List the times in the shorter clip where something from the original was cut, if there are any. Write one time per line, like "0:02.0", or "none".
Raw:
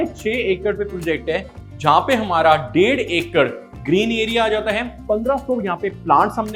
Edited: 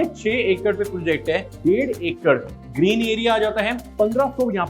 0:01.6

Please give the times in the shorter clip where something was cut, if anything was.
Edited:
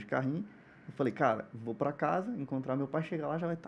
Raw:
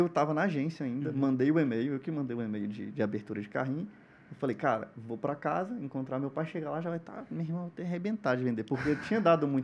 none

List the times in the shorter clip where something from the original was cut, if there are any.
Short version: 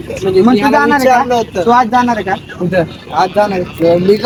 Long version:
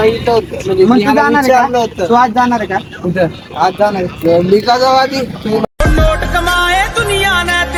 none

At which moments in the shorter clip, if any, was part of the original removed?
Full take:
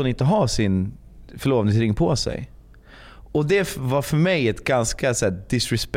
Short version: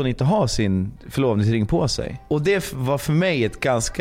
0:01.0
0:02.2

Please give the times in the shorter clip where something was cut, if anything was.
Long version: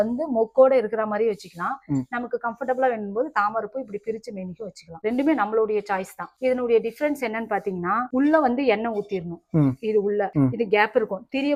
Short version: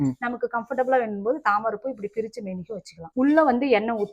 0:03.1

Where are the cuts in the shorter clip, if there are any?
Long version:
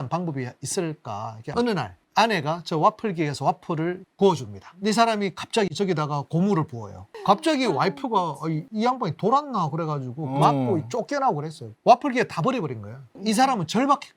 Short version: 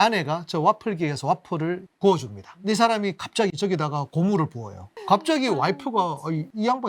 none

